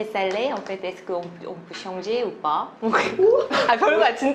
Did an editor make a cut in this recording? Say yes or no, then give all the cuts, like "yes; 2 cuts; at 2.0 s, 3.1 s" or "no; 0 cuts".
no; 0 cuts